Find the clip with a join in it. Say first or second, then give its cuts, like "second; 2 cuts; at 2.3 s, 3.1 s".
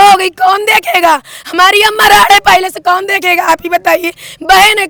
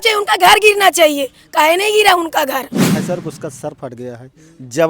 second; 1 cut; at 3.0 s